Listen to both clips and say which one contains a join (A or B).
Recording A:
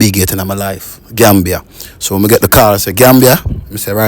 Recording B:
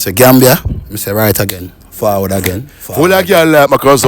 B